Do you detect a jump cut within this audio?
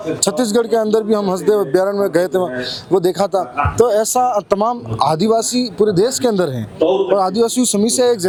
no; 0 cuts

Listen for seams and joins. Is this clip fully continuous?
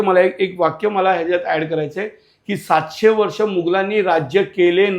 yes; 0 cuts

